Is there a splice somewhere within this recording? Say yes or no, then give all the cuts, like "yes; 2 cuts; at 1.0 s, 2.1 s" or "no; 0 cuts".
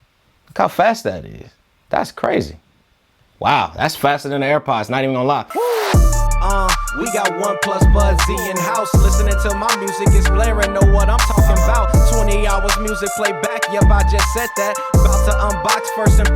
yes; 1 cut; at 5.5 s